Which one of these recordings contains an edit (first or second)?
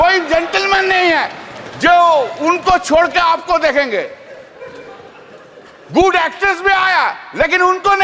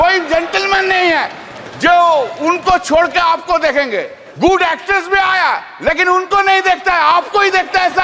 second